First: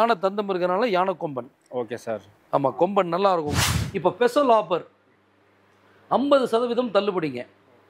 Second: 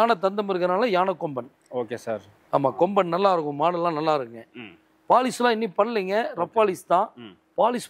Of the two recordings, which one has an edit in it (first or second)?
first